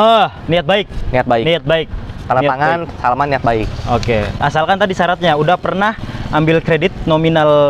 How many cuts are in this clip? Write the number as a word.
zero